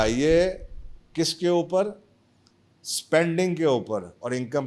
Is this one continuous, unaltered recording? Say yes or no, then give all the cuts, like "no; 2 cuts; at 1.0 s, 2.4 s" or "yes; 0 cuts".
yes; 0 cuts